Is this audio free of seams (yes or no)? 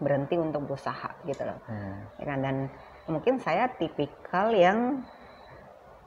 yes